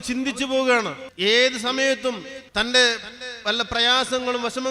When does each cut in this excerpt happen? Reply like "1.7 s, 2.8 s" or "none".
1.0 s, 2.4 s